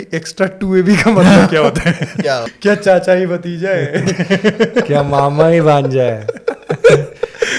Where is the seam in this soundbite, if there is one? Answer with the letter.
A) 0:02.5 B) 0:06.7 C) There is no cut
A